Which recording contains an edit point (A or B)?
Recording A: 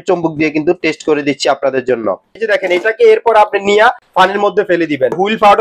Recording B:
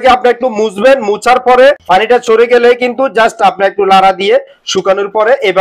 A